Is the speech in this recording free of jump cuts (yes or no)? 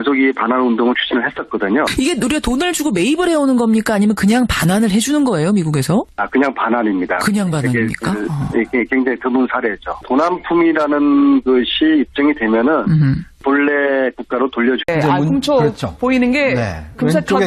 yes